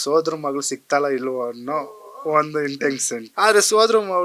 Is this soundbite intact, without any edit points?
no; 1 cut; at 3.2 s

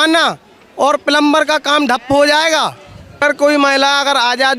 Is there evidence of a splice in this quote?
yes; 1 cut; at 3.2 s

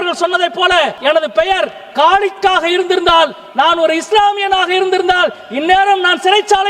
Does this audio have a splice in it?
yes; 1 cut; at 1.0 s

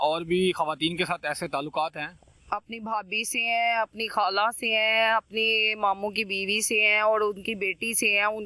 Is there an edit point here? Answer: no; 0 cuts

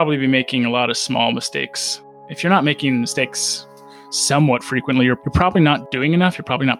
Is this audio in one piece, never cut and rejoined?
no; 1 cut; at 5.9 s

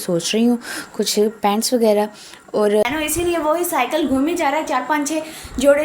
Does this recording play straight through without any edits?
no; 1 cut; at 2.8 s

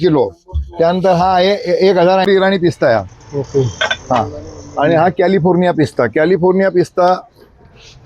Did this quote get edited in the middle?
yes; 1 cut; at 2.3 s

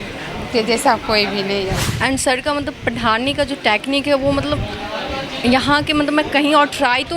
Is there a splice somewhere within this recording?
yes; 1 cut; at 1.9 s

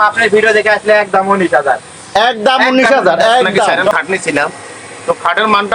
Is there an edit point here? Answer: yes; 1 cut; at 3.9 s

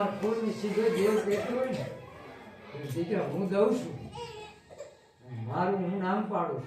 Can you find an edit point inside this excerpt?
no; 0 cuts

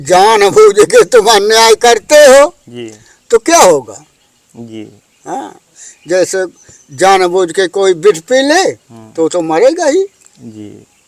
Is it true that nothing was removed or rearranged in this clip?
yes; 0 cuts

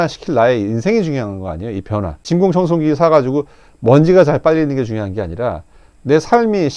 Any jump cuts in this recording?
yes; 1 cut; at 2.2 s

